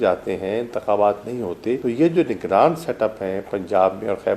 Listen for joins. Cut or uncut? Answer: cut